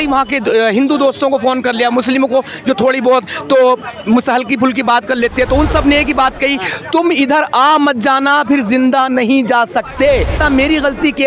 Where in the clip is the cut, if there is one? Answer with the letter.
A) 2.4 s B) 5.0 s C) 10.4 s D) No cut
C